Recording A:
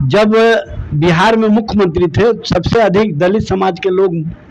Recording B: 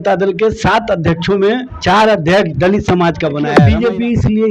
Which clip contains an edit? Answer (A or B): B